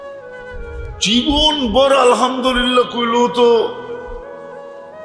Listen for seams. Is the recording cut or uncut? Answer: cut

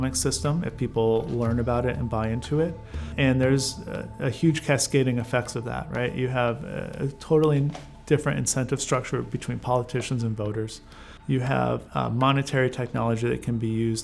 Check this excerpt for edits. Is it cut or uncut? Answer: cut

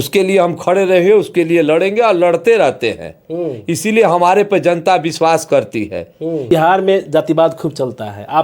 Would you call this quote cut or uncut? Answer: cut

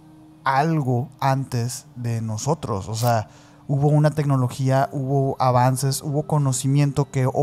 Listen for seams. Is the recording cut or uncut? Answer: uncut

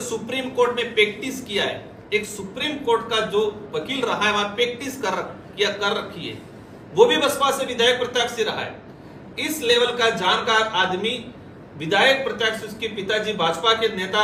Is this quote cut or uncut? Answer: uncut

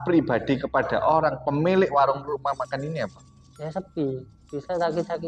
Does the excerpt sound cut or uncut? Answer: uncut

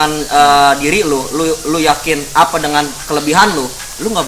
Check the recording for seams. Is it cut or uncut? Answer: uncut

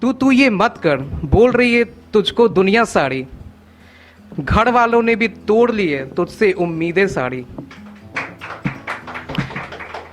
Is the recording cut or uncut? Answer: uncut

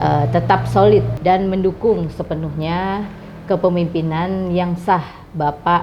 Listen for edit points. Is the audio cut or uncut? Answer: cut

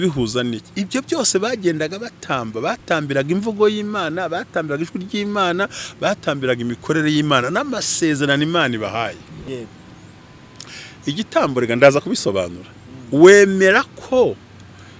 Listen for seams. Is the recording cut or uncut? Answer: cut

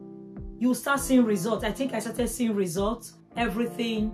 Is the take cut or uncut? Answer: uncut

